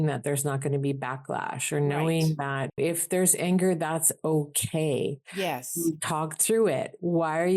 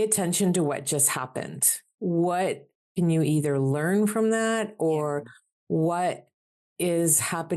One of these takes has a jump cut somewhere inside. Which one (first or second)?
first